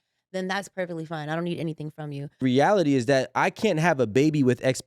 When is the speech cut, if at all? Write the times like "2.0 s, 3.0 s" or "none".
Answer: 2.4 s